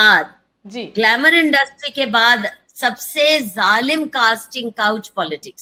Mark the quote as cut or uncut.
uncut